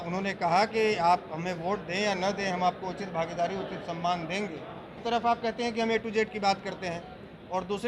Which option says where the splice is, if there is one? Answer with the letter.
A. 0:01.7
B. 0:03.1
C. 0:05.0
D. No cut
C